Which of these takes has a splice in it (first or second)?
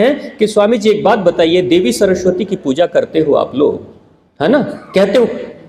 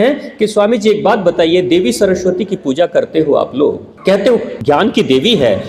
second